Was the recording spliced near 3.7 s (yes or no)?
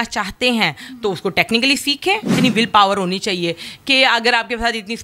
no